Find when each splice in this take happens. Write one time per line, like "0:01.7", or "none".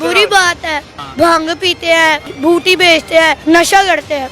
0:00.9
0:02.3
0:03.4